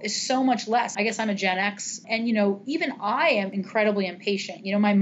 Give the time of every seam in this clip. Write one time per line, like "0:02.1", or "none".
0:00.9
0:02.0
0:03.6